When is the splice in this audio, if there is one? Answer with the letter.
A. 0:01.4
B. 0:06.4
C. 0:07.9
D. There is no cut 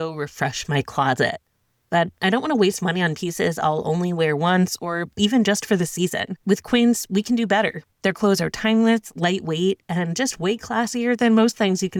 D